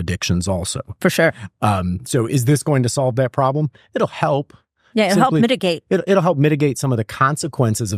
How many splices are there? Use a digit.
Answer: 0